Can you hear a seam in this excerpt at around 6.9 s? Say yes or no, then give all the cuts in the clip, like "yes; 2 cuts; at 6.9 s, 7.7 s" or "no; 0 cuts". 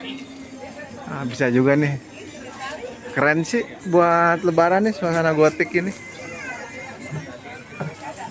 no; 0 cuts